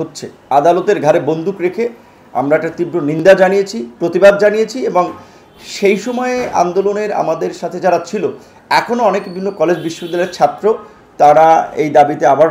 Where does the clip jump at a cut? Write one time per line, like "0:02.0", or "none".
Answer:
none